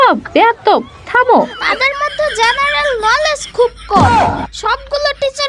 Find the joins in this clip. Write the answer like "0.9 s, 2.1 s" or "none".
1.6 s